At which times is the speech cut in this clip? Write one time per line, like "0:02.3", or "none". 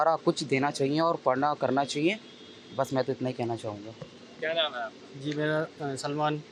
none